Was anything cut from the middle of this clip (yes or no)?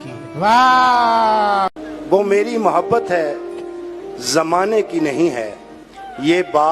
yes